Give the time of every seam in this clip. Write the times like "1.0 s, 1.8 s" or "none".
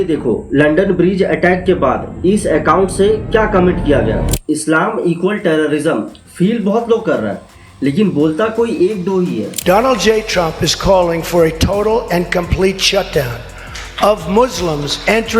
4.3 s, 9.5 s